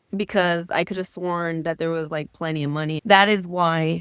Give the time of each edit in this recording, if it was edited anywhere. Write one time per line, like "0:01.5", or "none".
none